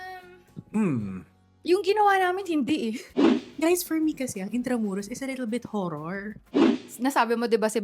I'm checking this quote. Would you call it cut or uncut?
cut